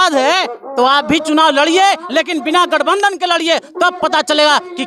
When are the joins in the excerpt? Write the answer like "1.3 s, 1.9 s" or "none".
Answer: none